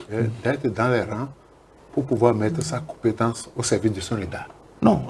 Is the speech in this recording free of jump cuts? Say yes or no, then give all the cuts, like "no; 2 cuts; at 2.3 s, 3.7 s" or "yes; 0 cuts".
yes; 0 cuts